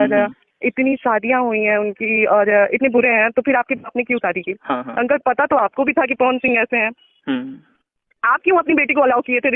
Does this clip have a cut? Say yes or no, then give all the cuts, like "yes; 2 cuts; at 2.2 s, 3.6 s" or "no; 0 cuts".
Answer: no; 0 cuts